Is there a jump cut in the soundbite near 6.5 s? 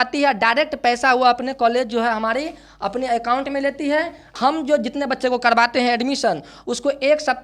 no; 1 cut; at 4.3 s

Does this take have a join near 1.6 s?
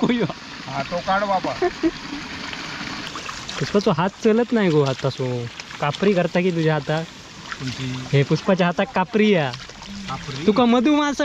no; 1 cut; at 3.1 s

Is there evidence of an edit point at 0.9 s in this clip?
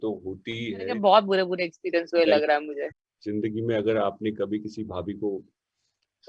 yes; 2 cuts; at 0.9 s, 2.8 s

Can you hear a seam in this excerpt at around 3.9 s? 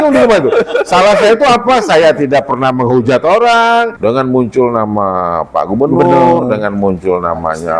yes; 1 cut; at 3.9 s

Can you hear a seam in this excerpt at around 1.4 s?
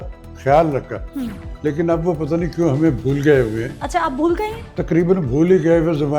no; 1 cut; at 4.7 s

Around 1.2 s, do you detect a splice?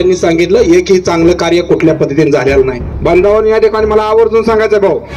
no; 1 cut; at 2.9 s

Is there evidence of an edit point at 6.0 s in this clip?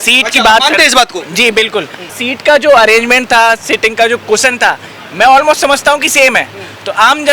no; 1 cut; at 2.1 s

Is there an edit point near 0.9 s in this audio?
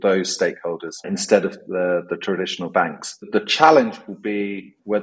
yes; 2 cuts; at 0.9 s, 3.2 s

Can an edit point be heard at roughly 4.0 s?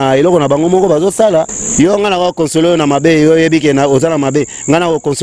no; 1 cut; at 1.6 s

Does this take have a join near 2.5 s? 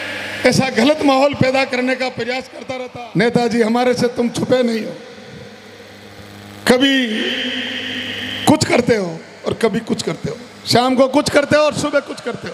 yes; 1 cut; at 2.5 s

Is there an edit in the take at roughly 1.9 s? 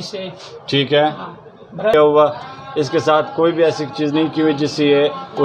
yes; 1 cut; at 1.9 s

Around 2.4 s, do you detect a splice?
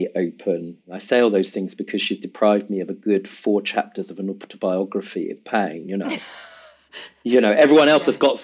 no; 1 cut; at 0.9 s

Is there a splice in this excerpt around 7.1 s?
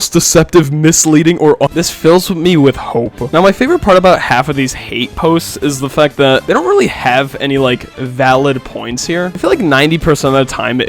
no; 1 cut; at 1.7 s

